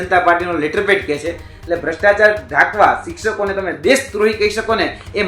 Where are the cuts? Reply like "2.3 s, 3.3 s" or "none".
1.5 s